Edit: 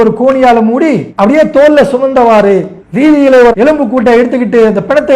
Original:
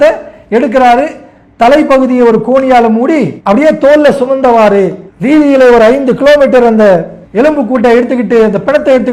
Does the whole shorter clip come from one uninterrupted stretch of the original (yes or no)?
no